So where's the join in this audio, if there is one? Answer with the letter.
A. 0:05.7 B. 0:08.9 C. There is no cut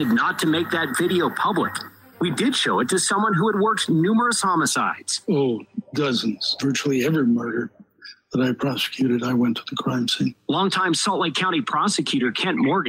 A